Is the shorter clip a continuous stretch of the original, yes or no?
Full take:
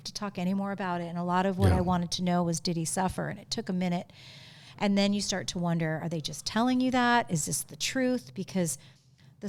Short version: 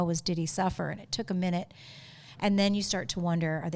yes